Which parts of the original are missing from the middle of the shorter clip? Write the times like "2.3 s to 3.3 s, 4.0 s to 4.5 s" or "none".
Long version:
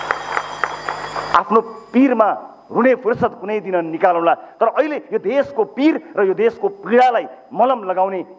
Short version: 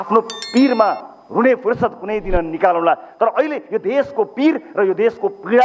none